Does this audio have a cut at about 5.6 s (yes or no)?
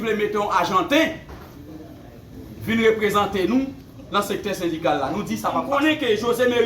yes